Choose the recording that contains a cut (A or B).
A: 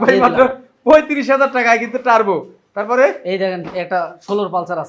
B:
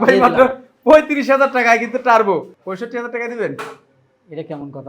B